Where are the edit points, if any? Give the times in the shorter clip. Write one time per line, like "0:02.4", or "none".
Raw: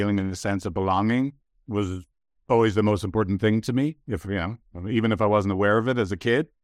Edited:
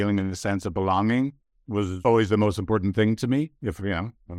0:01.9